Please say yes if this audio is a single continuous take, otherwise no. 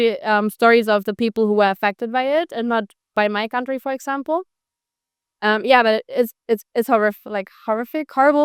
yes